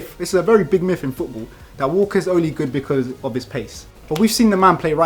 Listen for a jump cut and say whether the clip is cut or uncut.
uncut